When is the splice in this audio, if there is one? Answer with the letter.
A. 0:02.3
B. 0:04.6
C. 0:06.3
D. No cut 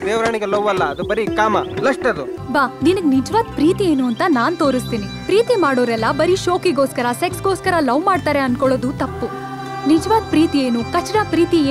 A